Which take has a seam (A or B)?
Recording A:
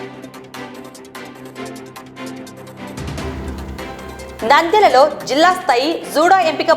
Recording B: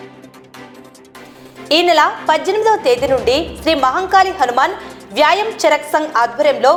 A